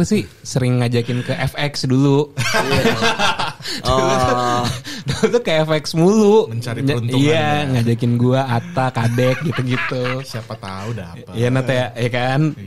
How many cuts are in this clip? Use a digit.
0